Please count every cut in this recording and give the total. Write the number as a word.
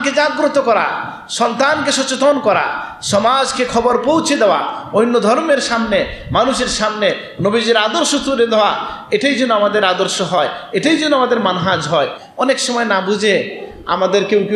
one